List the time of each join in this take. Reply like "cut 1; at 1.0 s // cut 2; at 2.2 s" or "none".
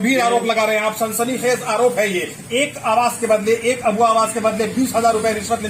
none